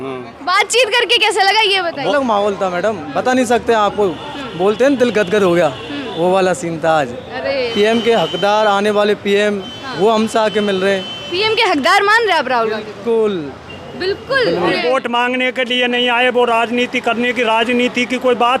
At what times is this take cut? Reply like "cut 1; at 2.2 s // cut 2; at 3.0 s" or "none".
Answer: cut 1; at 2.1 s // cut 2; at 7.7 s // cut 3; at 14.7 s